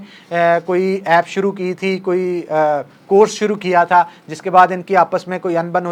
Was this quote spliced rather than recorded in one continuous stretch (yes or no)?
no